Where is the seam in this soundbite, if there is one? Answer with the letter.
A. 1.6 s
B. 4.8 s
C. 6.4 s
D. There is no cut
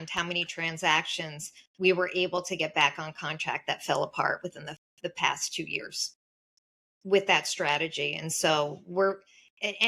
C